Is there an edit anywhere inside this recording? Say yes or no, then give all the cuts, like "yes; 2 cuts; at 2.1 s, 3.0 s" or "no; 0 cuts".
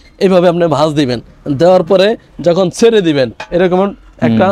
no; 0 cuts